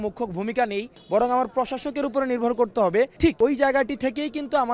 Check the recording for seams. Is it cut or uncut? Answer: cut